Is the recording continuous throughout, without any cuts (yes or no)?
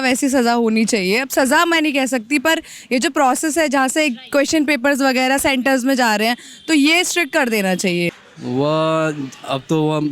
no